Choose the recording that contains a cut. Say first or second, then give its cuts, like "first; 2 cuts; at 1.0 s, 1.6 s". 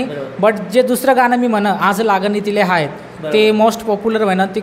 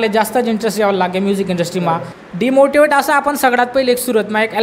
second; 1 cut; at 2.1 s